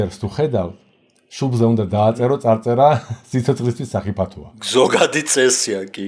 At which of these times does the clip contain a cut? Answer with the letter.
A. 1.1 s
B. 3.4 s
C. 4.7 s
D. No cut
C